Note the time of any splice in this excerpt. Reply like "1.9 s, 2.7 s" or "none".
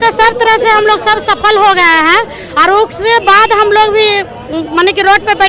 none